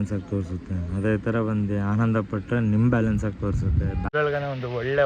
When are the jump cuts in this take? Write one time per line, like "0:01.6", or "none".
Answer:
0:04.0